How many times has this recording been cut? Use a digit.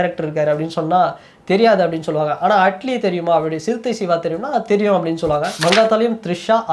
1